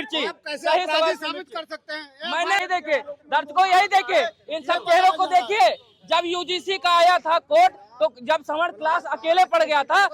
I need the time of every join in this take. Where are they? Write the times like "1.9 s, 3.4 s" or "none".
2.6 s